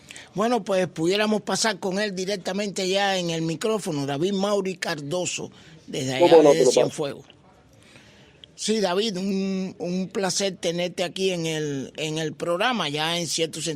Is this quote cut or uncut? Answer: cut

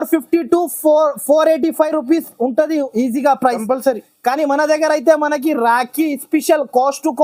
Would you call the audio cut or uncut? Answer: uncut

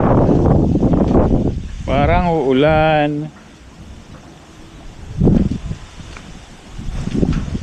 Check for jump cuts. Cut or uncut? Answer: uncut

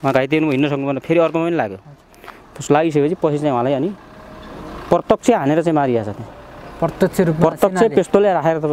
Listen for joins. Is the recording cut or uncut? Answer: uncut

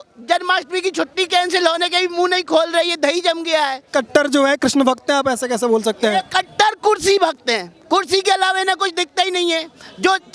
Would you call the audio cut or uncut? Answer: cut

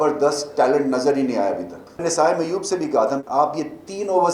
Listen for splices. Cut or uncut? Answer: cut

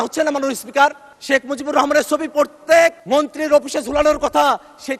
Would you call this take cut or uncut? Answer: cut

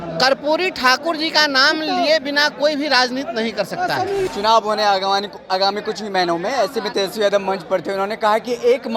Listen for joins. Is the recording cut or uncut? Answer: cut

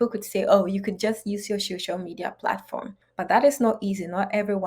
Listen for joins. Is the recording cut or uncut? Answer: cut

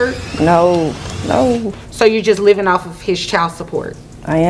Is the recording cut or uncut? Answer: uncut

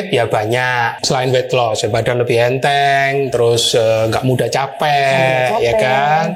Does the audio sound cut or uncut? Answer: cut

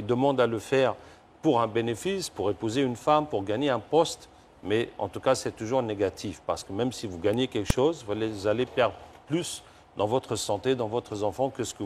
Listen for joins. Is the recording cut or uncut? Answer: uncut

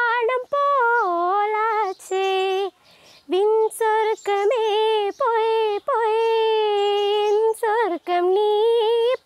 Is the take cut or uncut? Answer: uncut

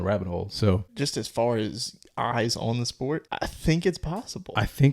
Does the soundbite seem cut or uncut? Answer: cut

